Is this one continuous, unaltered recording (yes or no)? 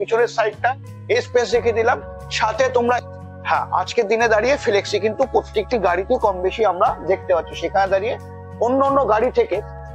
no